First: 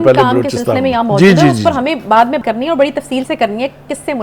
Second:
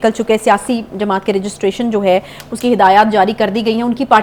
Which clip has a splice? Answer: first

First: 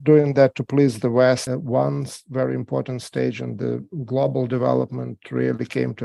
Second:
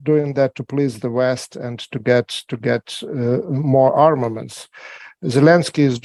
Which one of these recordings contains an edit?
first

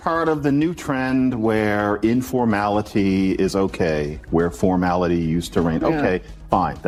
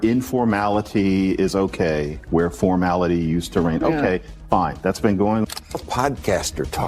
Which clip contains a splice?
second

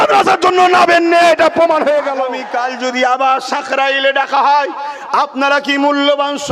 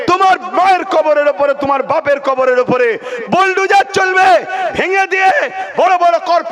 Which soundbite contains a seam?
first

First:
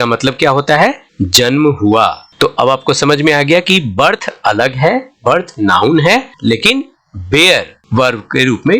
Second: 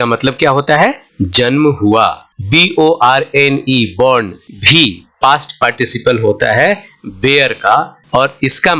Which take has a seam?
second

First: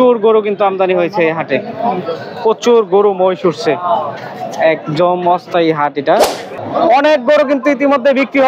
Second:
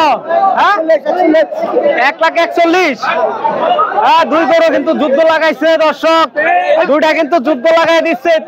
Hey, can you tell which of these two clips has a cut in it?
first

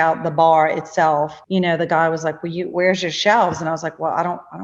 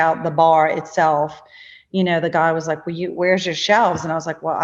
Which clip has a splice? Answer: first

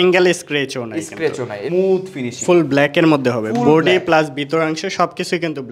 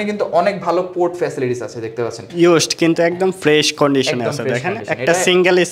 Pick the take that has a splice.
first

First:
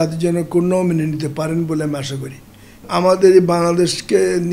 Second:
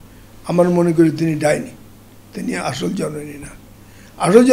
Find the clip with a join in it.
first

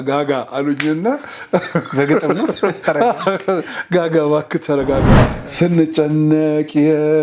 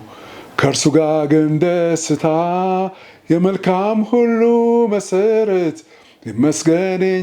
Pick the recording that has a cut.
first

